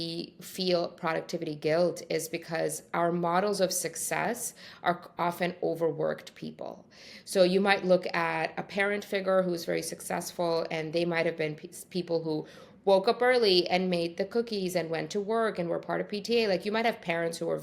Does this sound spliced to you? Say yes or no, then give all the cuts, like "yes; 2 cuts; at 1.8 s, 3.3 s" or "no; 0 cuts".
no; 0 cuts